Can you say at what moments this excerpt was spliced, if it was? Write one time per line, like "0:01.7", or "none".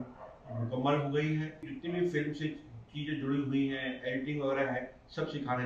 0:01.7